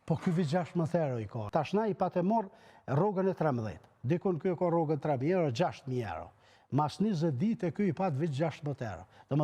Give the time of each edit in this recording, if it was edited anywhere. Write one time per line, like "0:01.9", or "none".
0:01.4